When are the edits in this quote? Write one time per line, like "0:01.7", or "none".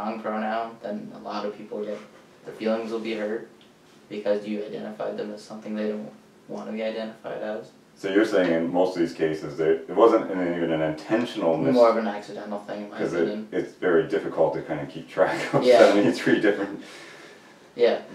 none